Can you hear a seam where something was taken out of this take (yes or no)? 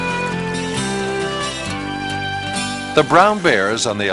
yes